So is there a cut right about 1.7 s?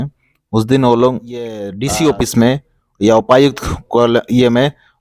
yes; 1 cut; at 1.7 s

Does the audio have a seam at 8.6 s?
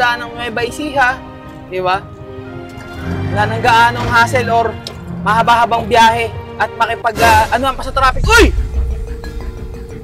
yes; 1 cut; at 8.6 s

